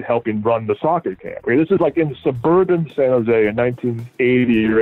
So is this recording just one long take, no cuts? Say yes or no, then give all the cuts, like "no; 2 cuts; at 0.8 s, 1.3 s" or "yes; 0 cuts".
yes; 0 cuts